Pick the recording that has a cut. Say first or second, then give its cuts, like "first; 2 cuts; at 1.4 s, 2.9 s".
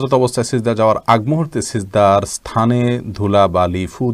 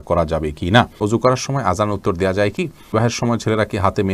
second; 2 cuts; at 0.9 s, 2.9 s